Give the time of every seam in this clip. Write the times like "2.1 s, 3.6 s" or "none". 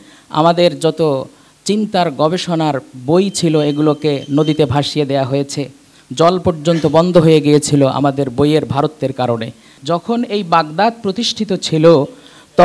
9.7 s